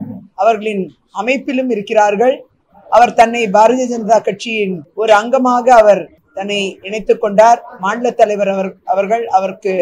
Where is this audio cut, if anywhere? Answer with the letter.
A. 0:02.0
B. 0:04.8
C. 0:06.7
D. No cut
D